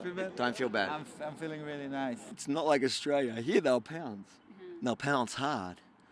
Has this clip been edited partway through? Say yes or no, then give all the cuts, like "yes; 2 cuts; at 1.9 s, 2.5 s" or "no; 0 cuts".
yes; 1 cut; at 2.3 s